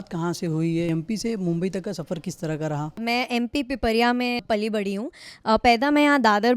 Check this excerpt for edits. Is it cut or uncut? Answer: cut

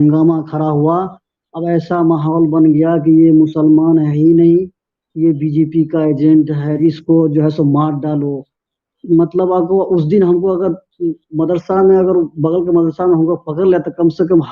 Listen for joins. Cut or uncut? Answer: cut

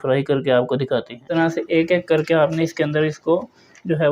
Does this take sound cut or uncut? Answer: cut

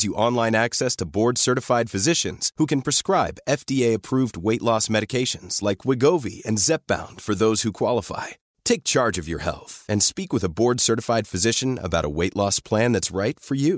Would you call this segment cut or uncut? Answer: uncut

